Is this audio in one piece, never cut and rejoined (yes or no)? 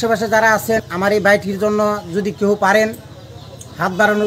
no